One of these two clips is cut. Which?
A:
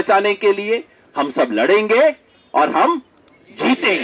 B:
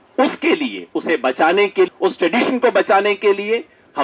B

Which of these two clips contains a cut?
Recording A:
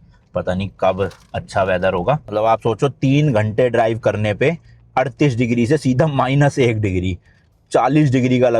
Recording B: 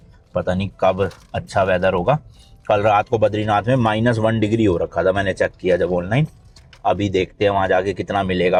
A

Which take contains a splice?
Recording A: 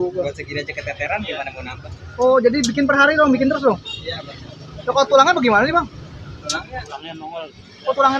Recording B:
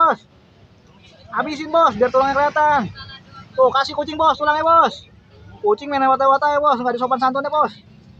A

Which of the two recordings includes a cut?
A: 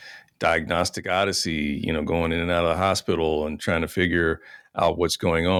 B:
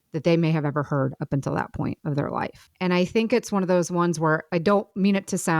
B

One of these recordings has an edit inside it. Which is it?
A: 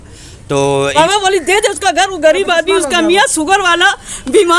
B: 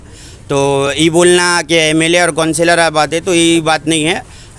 A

